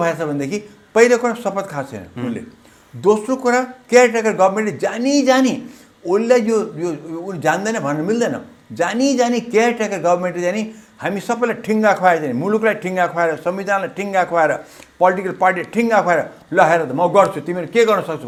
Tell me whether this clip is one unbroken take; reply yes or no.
yes